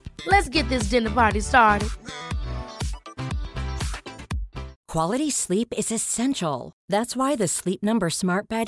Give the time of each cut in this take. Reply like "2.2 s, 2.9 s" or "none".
4.8 s